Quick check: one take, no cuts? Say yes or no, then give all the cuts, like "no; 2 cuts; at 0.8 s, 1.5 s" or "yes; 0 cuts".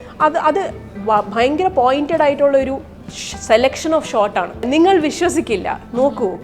no; 1 cut; at 4.7 s